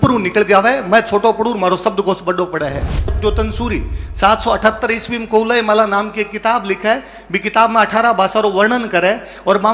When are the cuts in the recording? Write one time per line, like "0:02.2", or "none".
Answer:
0:03.2